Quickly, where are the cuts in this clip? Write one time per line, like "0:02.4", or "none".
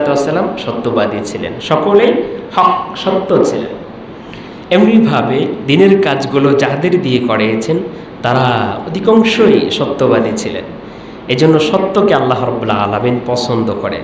none